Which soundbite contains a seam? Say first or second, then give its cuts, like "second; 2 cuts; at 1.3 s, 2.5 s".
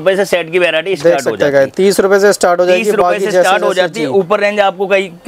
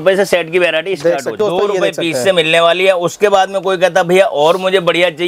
second; 1 cut; at 1.3 s